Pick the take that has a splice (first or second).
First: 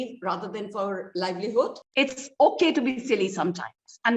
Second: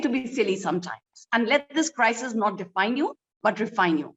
first